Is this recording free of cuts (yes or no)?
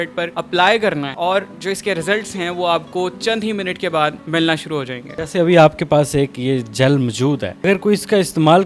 yes